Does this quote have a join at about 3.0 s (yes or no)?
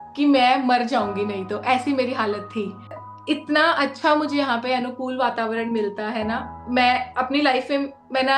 yes